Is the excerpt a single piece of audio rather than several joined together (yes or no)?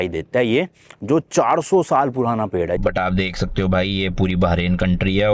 no